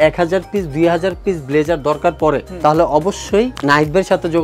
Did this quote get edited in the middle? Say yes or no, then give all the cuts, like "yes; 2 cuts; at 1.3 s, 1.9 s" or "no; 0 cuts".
no; 0 cuts